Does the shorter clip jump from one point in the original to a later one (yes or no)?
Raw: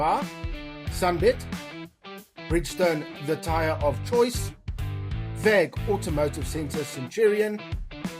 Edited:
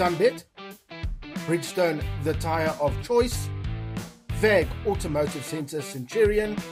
no